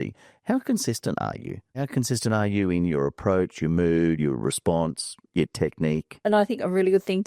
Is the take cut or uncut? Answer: cut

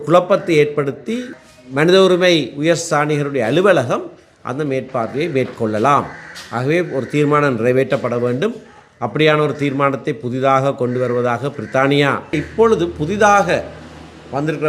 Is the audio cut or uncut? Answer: cut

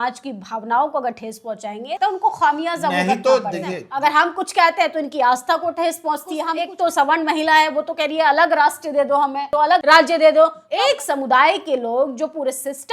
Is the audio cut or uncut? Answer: cut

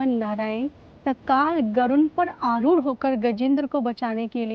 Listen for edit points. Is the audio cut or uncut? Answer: uncut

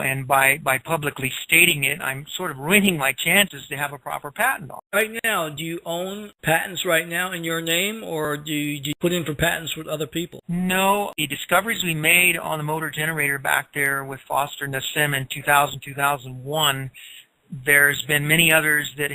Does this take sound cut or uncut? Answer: uncut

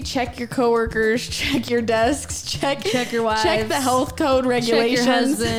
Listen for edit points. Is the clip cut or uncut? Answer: uncut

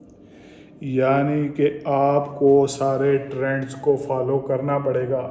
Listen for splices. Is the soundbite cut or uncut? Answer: uncut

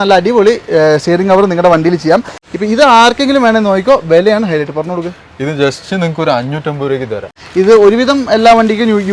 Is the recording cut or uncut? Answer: cut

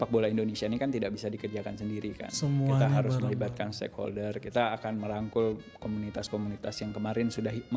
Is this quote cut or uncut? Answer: uncut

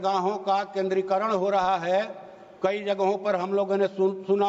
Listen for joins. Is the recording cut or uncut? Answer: uncut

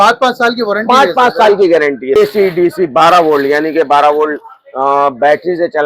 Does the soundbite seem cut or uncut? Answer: cut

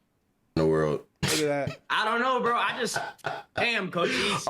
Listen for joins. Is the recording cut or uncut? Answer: uncut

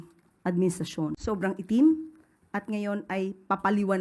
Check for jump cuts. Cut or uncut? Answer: cut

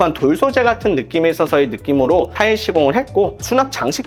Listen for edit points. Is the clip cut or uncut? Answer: uncut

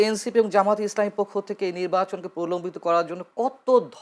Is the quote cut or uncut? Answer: uncut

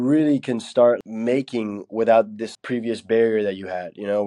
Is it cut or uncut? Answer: cut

